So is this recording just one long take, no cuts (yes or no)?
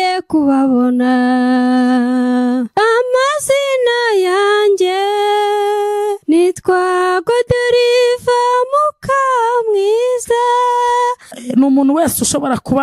no